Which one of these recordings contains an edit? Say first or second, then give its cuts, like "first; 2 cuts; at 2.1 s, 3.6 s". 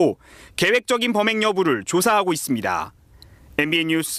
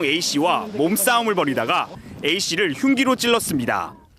second; 1 cut; at 1.0 s